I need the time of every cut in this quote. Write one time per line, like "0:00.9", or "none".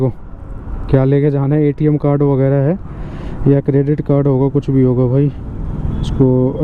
none